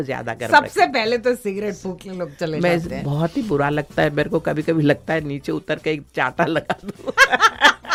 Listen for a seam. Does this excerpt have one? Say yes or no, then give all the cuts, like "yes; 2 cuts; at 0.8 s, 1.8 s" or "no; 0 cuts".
no; 0 cuts